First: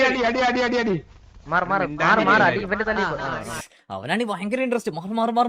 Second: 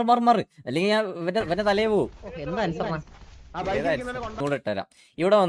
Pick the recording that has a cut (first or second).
second